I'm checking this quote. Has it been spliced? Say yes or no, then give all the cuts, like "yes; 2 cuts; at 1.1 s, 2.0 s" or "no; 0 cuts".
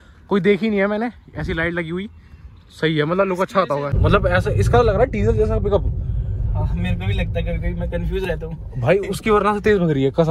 yes; 1 cut; at 3.9 s